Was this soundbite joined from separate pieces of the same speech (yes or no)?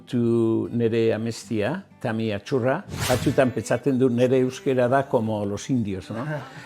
yes